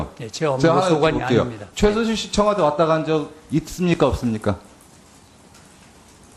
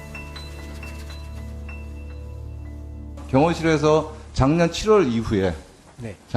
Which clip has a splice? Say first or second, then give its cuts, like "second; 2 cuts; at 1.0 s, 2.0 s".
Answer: second; 1 cut; at 5.4 s